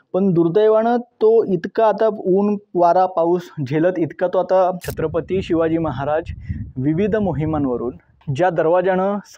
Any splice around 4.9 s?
yes; 1 cut; at 4.9 s

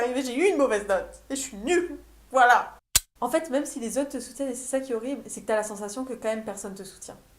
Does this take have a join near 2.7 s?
yes; 1 cut; at 2.7 s

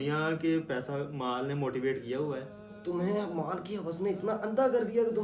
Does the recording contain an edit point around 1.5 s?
no; 1 cut; at 2.7 s

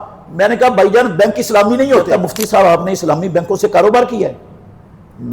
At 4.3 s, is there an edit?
no; 1 cut; at 2.1 s

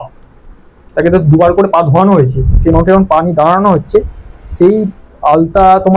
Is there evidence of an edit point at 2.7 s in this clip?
no; 0 cuts

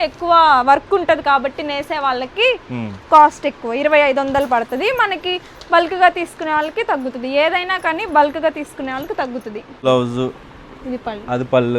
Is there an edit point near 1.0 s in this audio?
no; 1 cut; at 9.8 s

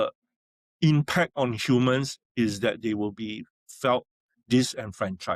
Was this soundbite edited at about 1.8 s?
no; 0 cuts

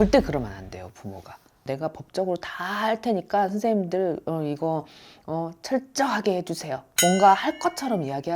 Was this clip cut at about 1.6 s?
yes; 2 cuts; at 1.6 s, 6.8 s

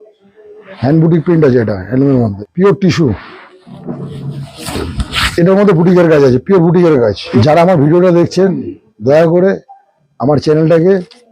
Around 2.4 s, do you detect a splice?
yes; 2 cuts; at 2.4 s, 7.2 s

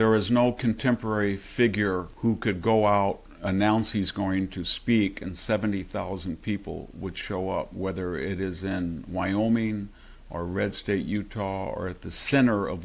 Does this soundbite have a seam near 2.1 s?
yes; 1 cut; at 2.1 s

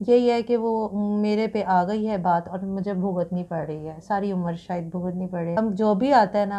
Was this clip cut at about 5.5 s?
yes; 1 cut; at 5.5 s

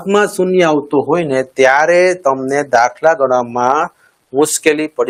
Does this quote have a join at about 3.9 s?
no; 0 cuts

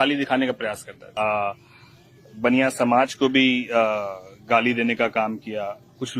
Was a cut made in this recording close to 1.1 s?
yes; 1 cut; at 1.1 s

